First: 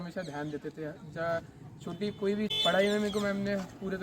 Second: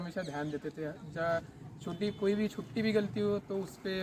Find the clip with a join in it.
first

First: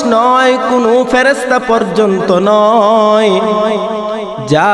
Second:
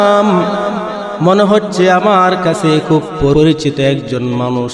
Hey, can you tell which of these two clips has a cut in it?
second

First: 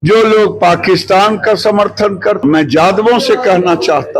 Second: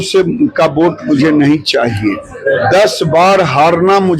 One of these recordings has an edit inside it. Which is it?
first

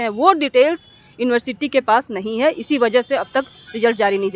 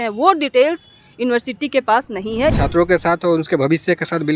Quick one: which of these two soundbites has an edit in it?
second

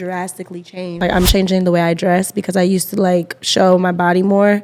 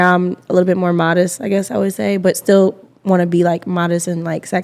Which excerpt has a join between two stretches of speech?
first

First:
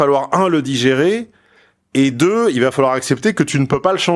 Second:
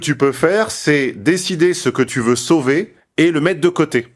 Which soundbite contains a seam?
second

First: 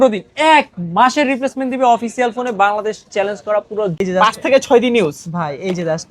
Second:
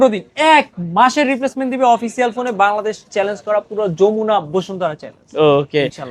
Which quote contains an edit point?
first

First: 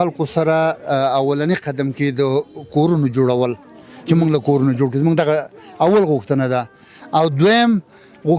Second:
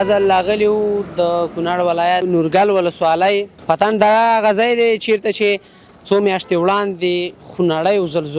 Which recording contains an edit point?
second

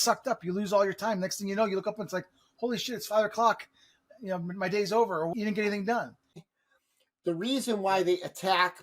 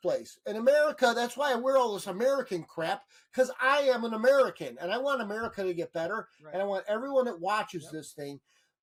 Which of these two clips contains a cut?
first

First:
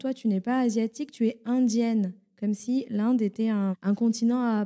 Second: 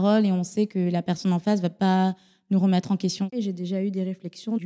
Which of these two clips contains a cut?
second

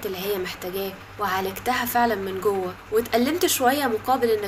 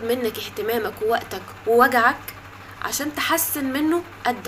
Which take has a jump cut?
first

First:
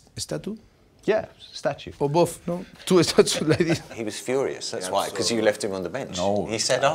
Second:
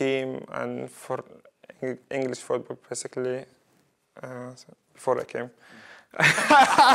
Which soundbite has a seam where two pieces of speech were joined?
first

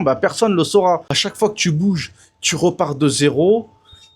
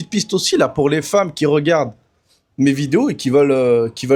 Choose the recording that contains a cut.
first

